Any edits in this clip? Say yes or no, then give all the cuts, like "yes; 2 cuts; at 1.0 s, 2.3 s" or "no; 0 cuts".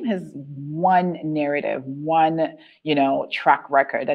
no; 0 cuts